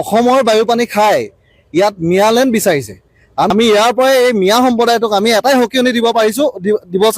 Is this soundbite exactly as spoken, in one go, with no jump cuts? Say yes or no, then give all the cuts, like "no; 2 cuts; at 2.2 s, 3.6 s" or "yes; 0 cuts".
no; 1 cut; at 3.5 s